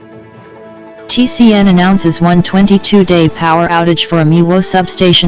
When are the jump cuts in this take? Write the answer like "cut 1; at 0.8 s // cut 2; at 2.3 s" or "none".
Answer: none